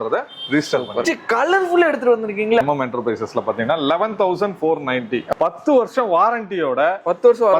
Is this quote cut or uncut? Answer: cut